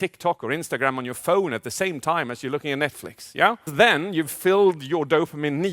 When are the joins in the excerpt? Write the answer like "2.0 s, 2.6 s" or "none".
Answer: 3.7 s